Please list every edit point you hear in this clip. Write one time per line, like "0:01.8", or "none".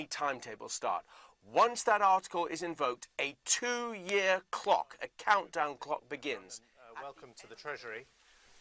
0:04.2